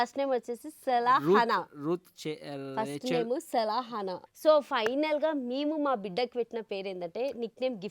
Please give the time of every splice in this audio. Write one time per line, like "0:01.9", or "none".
0:04.2